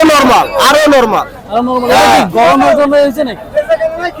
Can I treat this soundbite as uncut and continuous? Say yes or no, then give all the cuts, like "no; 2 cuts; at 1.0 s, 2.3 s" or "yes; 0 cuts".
yes; 0 cuts